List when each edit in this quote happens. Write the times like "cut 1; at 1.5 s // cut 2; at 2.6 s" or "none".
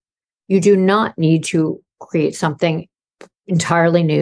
none